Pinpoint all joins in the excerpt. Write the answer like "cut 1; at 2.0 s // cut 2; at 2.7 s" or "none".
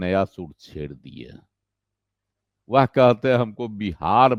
none